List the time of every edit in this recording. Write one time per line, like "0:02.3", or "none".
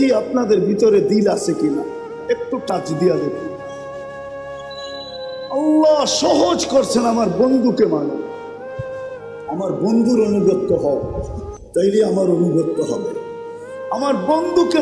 0:03.8
0:05.1
0:08.2
0:09.5